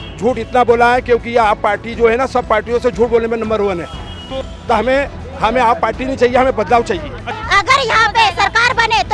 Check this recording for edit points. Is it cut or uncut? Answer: cut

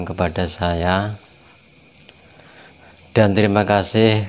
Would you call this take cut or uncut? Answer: uncut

